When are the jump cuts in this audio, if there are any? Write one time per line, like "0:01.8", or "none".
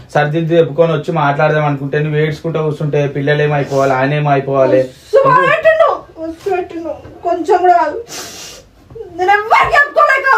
none